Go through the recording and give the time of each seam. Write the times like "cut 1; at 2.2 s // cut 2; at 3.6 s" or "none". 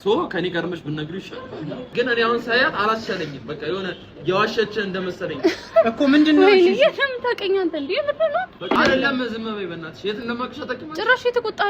cut 1; at 1.9 s // cut 2; at 8.8 s